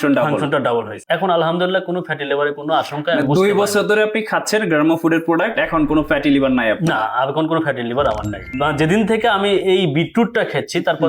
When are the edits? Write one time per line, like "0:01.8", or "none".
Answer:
0:01.0
0:08.5